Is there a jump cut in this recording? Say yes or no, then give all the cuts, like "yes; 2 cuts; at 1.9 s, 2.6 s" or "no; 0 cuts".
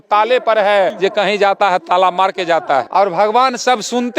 yes; 2 cuts; at 0.9 s, 2.9 s